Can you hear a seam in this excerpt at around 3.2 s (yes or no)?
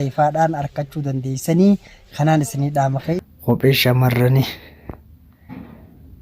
yes